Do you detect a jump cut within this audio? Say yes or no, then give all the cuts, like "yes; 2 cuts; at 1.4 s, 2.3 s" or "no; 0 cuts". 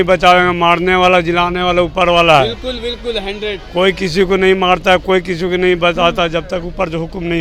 no; 0 cuts